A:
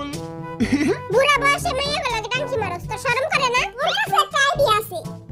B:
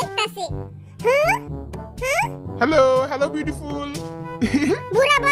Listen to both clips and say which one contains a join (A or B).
A